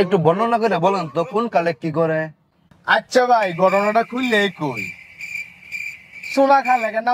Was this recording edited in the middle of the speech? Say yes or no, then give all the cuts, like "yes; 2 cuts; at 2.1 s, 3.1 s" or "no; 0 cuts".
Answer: no; 0 cuts